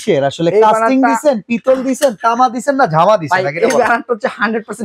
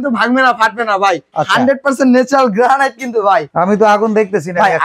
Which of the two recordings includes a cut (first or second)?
second